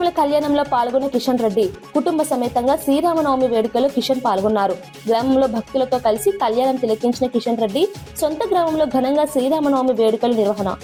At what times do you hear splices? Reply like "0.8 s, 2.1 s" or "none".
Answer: none